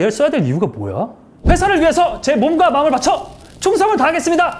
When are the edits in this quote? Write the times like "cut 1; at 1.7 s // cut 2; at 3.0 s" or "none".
cut 1; at 1.3 s